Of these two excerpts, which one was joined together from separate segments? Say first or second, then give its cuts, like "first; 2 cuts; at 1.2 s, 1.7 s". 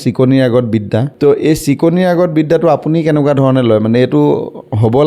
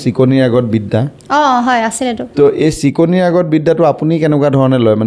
first; 1 cut; at 1.1 s